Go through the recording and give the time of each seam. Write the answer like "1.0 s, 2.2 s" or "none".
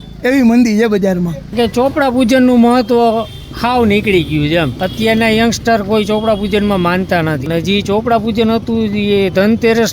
1.5 s, 4.8 s, 7.4 s

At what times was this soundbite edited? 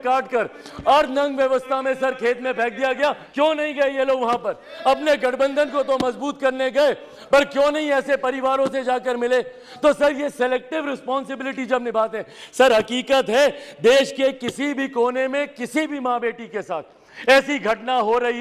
3.2 s

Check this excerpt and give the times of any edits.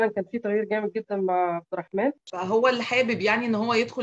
2.3 s

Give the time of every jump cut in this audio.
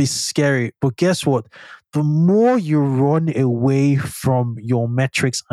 none

